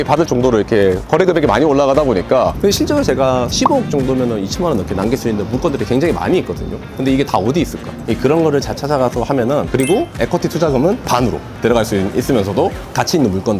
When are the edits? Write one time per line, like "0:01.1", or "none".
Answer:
0:02.5
0:08.0
0:09.7